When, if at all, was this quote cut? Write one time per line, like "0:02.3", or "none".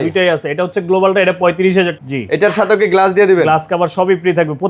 0:02.0